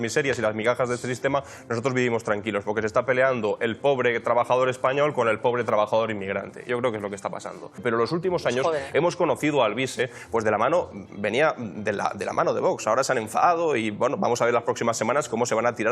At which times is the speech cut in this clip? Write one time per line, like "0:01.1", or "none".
0:07.8